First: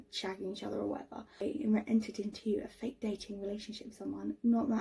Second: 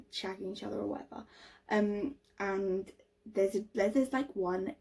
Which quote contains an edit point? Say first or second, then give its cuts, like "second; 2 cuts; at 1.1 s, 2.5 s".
first; 1 cut; at 1.4 s